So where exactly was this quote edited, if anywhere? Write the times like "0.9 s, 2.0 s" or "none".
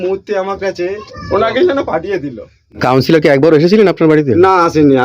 1.1 s, 2.7 s